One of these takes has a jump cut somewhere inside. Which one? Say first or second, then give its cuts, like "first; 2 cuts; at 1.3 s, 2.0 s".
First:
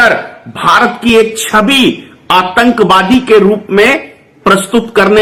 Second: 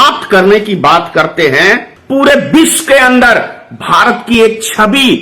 second; 1 cut; at 1.9 s